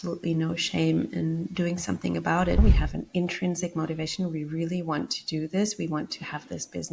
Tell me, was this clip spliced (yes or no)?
yes